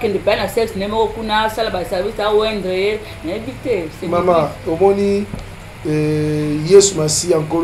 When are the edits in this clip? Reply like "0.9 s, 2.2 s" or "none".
none